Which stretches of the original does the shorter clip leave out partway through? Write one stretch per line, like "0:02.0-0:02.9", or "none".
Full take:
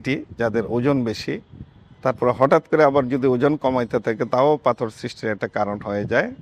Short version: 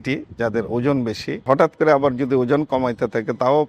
0:01.4-0:02.4